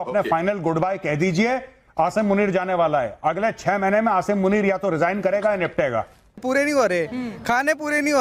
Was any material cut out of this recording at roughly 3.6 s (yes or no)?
no